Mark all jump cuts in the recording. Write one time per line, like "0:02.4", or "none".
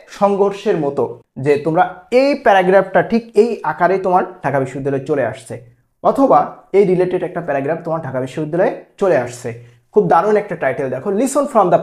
0:01.2